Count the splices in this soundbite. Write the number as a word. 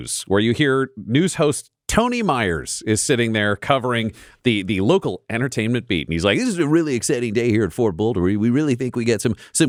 zero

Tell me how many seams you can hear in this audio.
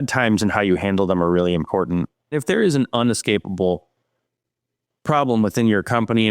one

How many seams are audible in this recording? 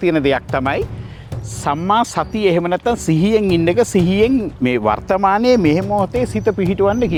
zero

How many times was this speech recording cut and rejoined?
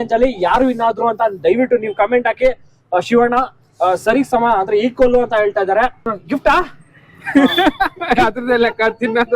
one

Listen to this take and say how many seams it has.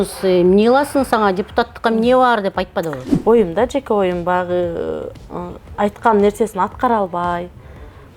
one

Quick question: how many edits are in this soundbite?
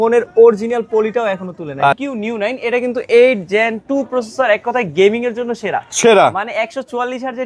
one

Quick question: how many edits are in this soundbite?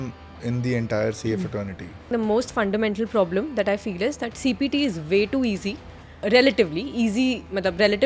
two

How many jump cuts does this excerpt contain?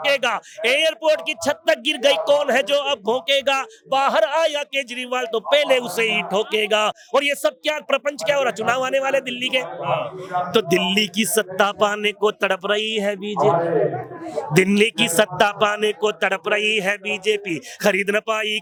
zero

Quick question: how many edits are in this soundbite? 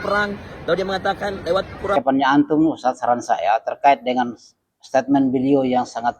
one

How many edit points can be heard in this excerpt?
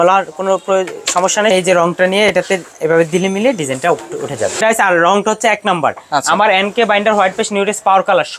two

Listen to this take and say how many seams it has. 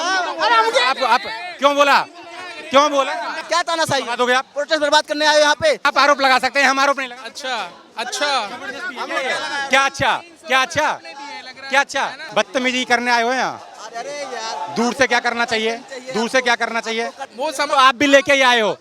three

